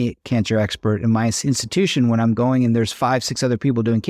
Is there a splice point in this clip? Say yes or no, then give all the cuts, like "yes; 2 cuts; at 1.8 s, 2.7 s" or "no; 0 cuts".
no; 0 cuts